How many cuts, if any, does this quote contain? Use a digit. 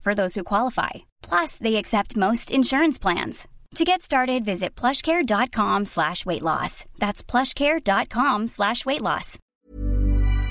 1